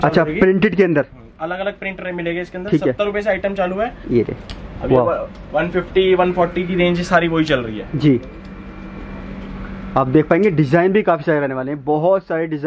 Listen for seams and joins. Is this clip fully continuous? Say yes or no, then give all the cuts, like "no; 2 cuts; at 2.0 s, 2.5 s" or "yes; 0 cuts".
no; 1 cut; at 4.0 s